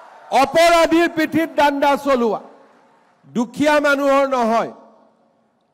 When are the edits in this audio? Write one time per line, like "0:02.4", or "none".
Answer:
none